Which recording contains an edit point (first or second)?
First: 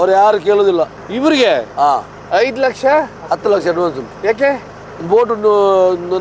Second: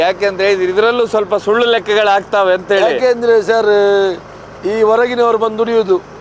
first